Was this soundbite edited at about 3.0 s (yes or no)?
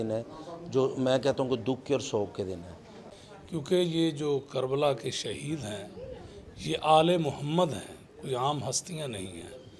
yes